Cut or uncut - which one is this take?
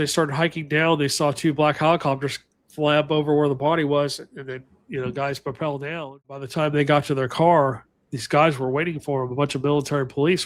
cut